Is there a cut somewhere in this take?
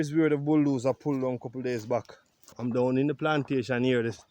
yes; 1 cut; at 2.5 s

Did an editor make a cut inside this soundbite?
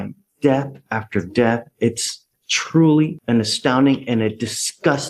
no; 0 cuts

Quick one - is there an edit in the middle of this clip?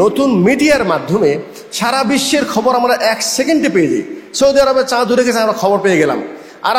no; 0 cuts

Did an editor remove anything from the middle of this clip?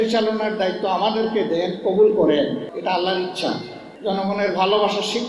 yes; 2 cuts; at 2.7 s, 3.9 s

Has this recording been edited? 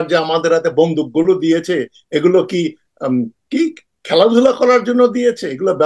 no; 0 cuts

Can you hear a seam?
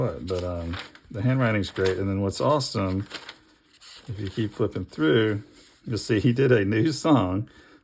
no; 0 cuts

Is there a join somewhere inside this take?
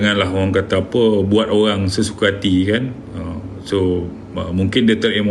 no; 0 cuts

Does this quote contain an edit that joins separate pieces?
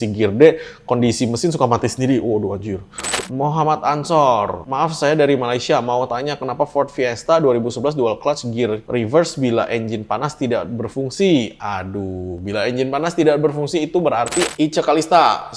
yes; 2 cuts; at 3.1 s, 14.5 s

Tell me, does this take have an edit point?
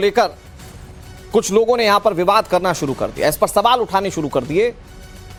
no; 0 cuts

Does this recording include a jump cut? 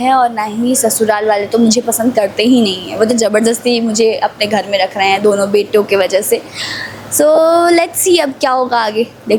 no; 0 cuts

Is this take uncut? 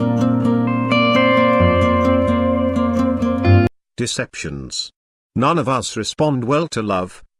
no; 1 cut; at 3.7 s

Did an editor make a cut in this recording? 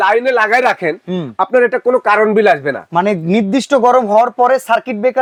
no; 0 cuts

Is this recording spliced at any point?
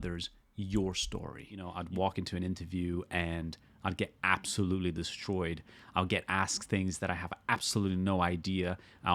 yes; 1 cut; at 1.8 s

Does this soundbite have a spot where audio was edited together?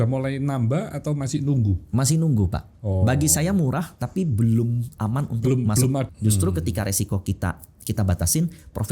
yes; 1 cut; at 6.1 s

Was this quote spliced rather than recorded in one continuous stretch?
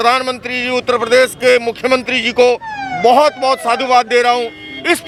no; 0 cuts

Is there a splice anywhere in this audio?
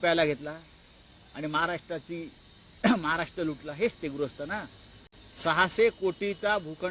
no; 0 cuts

